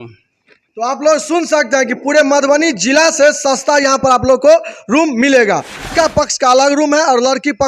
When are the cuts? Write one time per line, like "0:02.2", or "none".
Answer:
0:05.9